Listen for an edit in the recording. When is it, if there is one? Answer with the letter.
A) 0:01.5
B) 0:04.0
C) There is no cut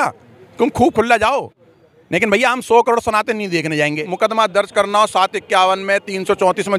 B